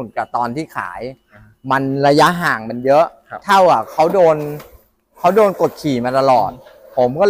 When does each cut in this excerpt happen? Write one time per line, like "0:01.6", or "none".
none